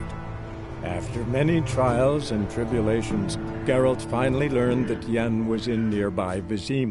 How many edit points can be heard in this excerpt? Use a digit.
0